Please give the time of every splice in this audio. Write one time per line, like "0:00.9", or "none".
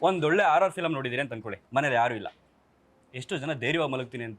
0:01.5